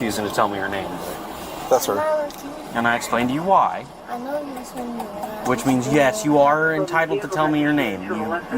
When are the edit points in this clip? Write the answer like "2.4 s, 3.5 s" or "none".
2.5 s, 4.0 s

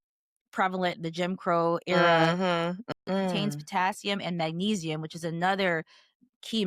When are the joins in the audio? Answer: 2.9 s

